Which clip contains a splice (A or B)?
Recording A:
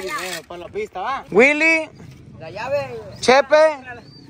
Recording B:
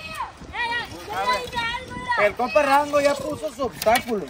A